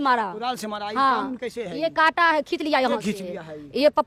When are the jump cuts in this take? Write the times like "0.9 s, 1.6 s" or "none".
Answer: none